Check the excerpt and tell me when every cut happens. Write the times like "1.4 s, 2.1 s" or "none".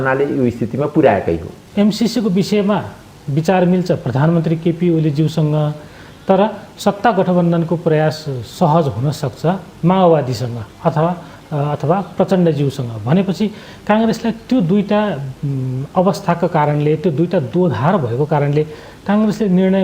1.6 s